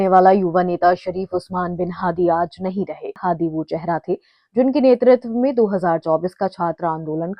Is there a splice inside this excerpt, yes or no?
yes